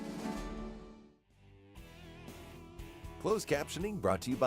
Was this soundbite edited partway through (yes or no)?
yes